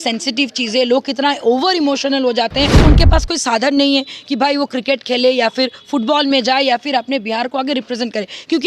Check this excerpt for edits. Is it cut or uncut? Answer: cut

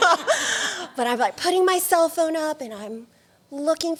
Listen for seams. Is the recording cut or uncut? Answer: uncut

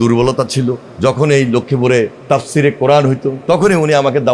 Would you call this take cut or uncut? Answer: cut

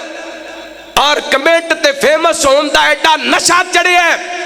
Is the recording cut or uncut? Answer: uncut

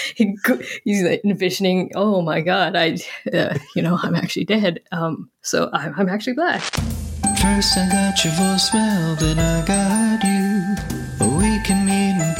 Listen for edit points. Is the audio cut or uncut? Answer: cut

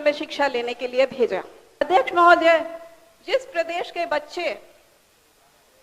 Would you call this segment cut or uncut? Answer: cut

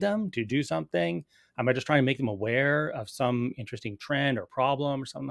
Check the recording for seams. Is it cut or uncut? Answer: uncut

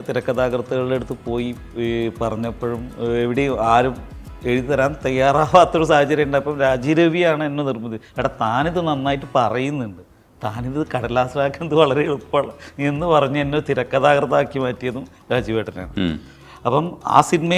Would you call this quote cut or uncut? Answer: uncut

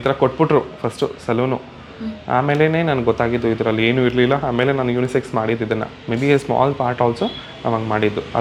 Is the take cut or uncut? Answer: uncut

